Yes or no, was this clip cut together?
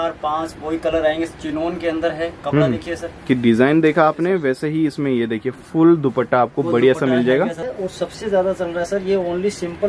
yes